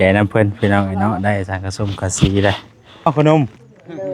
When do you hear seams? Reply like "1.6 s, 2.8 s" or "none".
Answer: 3.1 s